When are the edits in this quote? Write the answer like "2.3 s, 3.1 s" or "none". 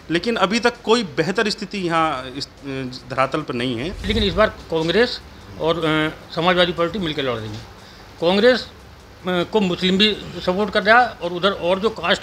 4.0 s